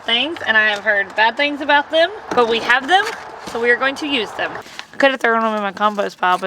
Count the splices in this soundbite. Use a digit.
1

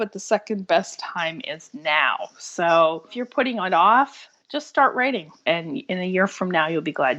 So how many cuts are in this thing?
2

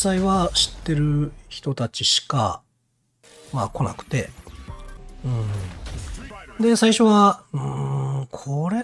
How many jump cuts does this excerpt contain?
0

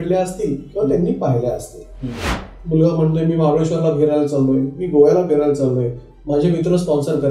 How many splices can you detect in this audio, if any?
1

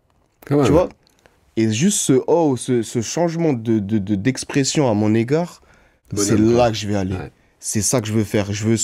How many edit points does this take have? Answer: 1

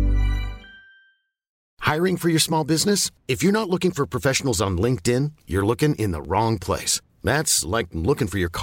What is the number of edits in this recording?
1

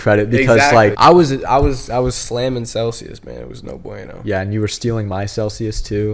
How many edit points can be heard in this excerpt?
1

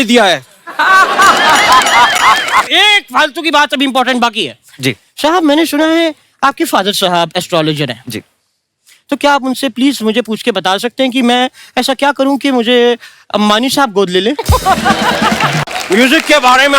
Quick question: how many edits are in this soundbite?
2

